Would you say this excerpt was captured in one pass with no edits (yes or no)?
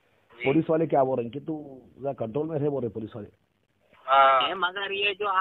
no